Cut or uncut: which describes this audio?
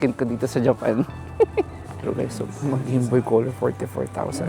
cut